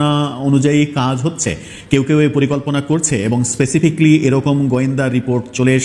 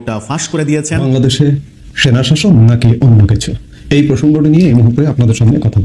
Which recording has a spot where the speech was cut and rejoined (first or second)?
second